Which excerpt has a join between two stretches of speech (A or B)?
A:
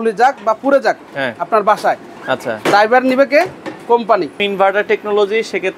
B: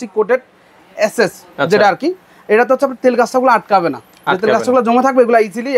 A